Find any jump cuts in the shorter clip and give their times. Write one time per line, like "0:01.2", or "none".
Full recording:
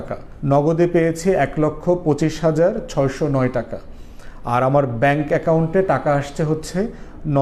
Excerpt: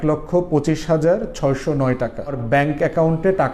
0:02.4